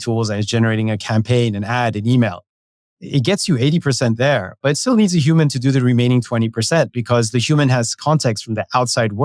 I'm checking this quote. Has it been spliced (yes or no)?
no